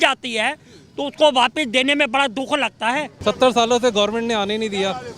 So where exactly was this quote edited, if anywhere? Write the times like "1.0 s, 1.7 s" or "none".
3.2 s